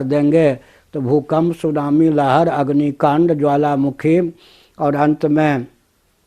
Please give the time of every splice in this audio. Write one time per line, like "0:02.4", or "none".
none